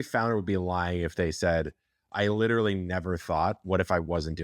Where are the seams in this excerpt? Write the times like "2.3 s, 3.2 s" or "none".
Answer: none